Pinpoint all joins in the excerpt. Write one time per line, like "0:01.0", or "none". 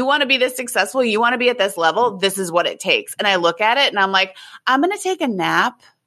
none